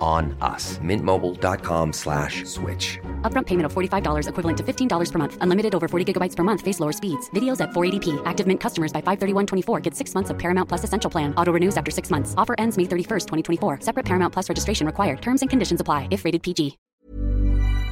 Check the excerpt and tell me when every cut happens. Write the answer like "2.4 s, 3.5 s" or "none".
16.9 s